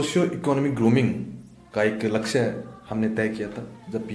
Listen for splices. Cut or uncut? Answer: uncut